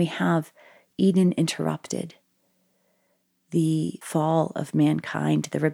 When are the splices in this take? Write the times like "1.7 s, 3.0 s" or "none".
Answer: 4.0 s